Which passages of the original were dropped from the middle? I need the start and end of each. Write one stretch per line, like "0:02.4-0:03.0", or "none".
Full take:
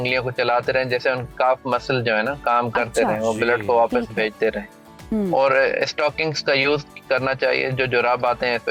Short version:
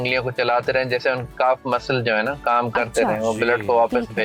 none